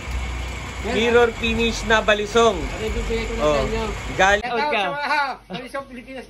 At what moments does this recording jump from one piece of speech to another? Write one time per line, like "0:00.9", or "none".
0:04.4